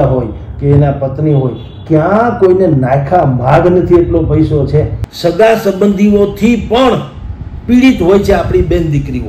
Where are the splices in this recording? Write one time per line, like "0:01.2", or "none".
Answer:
0:05.0